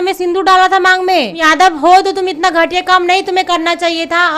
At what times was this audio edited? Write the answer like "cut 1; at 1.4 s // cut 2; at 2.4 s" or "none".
cut 1; at 1.4 s